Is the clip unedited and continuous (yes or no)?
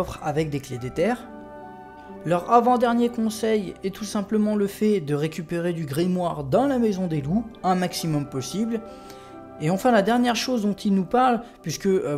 yes